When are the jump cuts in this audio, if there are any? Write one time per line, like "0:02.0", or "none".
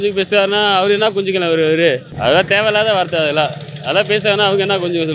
0:02.1